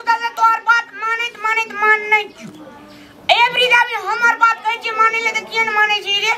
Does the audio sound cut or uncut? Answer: uncut